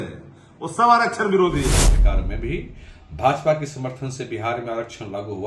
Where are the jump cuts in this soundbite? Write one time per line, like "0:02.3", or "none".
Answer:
0:01.9